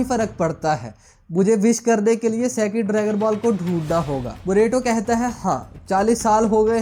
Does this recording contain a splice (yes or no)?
no